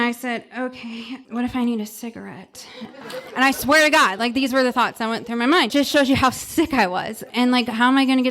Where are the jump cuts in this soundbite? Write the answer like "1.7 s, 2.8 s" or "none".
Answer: 1.2 s, 3.0 s, 5.7 s, 7.3 s